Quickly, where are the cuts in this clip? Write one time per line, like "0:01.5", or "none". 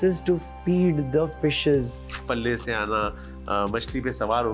0:02.2